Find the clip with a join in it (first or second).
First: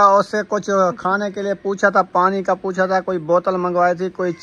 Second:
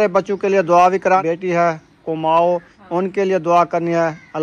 second